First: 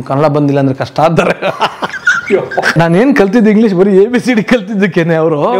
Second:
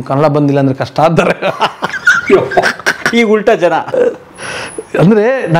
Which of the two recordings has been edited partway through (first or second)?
first